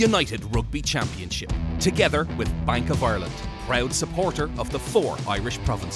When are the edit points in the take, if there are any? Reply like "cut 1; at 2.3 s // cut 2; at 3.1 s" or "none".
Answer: none